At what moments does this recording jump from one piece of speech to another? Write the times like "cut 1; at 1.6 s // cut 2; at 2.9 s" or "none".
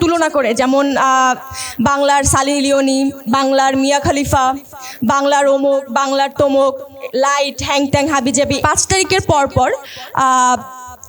cut 1; at 8.6 s